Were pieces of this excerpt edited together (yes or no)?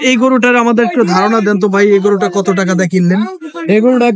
no